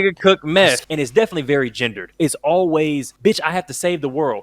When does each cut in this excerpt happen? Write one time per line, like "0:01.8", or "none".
0:00.8
0:02.1
0:03.1

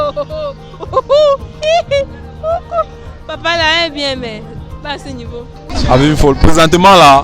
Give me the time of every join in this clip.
0:05.8

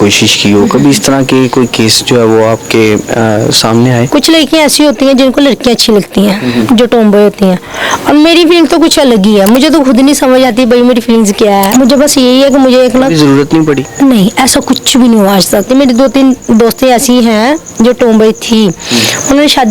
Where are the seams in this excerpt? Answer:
0:04.0
0:11.7
0:15.7

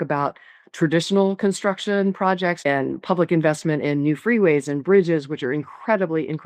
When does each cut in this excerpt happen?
0:02.6

